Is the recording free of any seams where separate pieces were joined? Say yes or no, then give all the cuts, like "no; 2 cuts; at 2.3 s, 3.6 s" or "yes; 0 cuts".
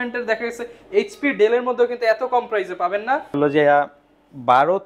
no; 1 cut; at 3.3 s